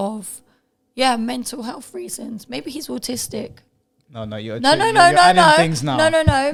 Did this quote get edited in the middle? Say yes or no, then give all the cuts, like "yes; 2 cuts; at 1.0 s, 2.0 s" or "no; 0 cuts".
no; 0 cuts